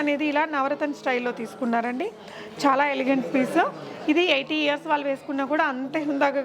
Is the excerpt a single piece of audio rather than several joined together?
yes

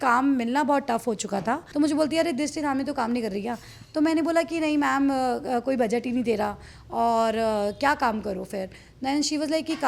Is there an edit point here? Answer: yes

